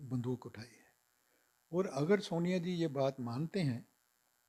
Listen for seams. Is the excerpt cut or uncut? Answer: uncut